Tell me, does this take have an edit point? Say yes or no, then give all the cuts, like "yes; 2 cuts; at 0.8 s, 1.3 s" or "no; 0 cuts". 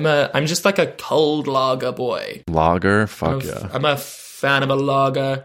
yes; 2 cuts; at 1.0 s, 2.4 s